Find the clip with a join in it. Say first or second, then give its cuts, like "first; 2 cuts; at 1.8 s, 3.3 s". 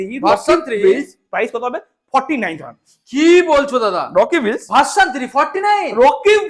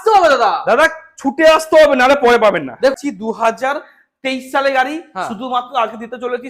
second; 1 cut; at 2.9 s